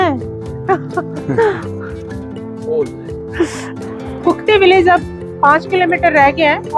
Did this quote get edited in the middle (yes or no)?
yes